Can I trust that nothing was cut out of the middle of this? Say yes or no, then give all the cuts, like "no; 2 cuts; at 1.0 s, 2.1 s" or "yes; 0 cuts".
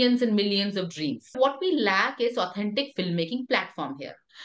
no; 1 cut; at 1.3 s